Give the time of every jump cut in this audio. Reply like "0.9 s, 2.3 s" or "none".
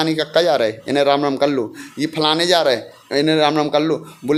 none